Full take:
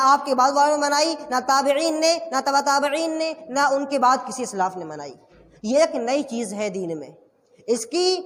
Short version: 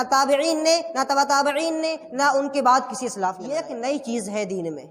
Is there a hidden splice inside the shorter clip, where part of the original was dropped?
yes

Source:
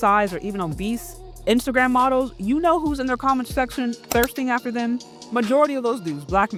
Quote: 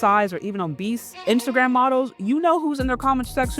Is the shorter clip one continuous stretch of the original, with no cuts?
no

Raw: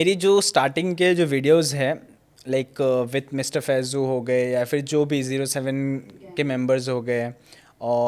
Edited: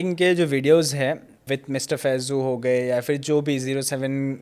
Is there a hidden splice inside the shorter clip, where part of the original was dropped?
yes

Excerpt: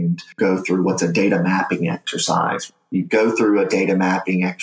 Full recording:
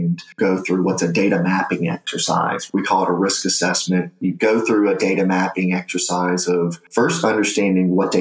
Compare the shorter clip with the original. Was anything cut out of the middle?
yes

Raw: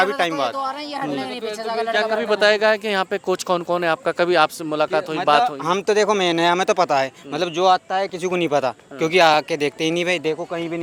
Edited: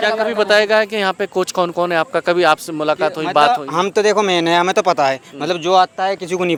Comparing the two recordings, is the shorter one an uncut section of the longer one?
yes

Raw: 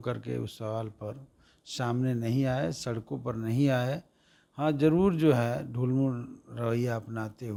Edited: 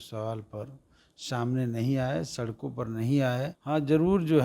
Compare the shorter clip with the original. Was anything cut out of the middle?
yes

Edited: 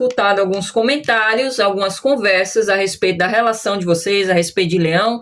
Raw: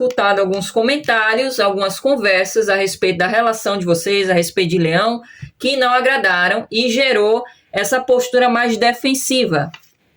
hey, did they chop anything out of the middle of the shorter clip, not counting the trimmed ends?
no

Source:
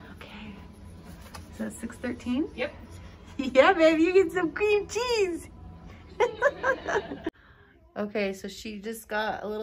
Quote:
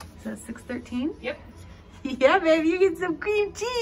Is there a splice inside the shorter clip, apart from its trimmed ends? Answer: no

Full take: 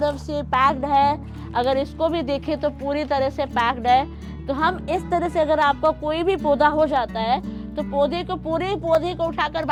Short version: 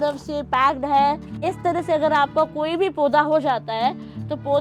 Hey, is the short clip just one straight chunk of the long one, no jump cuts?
no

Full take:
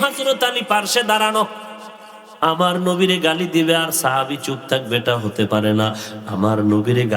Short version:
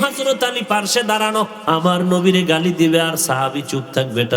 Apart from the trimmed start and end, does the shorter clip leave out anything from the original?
yes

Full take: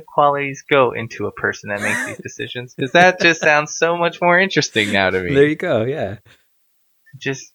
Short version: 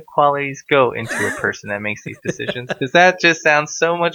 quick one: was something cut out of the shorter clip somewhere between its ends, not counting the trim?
no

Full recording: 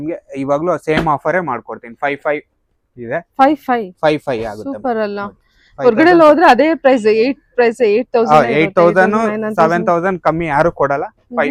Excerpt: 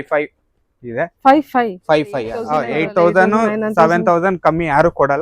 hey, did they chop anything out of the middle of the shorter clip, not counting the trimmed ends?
yes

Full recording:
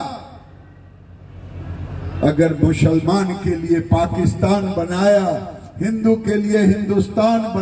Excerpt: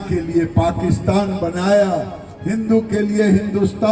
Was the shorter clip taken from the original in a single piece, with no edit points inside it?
yes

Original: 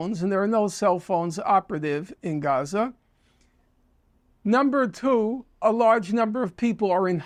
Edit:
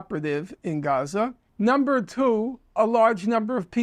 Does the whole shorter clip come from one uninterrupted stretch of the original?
no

